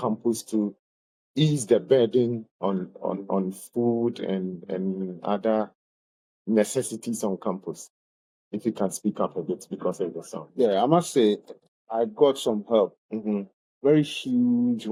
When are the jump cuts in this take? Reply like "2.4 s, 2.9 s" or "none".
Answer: none